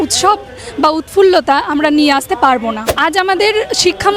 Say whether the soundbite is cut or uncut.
cut